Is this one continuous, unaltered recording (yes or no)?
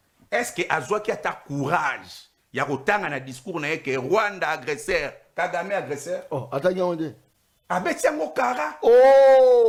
yes